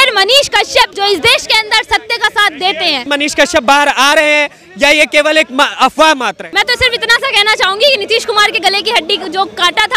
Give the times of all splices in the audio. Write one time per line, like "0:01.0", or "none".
0:00.9
0:03.1
0:06.4

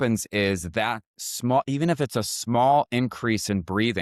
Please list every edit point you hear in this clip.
none

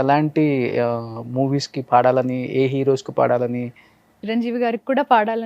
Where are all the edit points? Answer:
0:04.2

